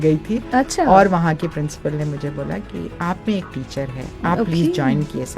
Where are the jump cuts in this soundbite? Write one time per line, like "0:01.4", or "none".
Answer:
0:04.0